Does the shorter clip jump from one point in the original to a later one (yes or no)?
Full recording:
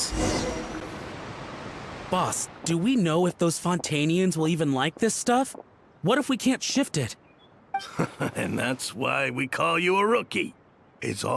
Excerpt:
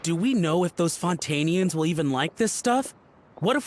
no